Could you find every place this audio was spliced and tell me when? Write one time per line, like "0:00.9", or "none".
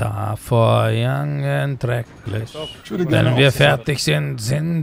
0:02.8